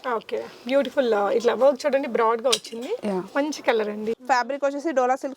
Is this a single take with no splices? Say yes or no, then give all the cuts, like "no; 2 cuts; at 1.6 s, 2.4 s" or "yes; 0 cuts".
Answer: no; 1 cut; at 4.1 s